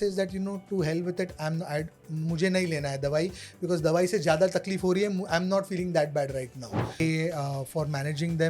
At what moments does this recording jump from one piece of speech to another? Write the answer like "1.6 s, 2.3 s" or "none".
7.0 s